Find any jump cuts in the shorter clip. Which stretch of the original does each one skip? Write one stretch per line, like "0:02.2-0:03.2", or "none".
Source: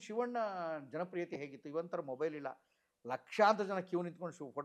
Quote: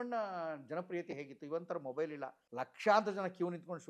0:02.6-0:02.9